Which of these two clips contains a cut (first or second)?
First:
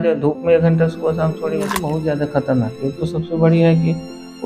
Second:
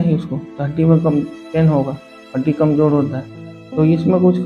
first